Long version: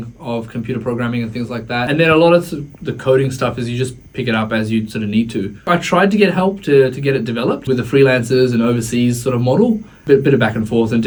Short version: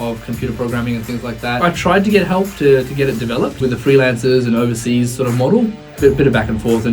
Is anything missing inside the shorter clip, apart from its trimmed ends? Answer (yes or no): yes